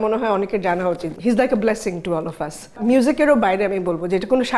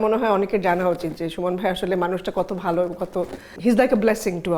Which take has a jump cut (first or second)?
first